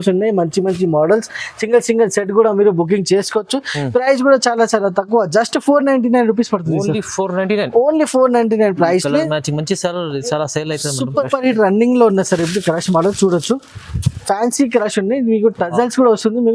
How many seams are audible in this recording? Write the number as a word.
one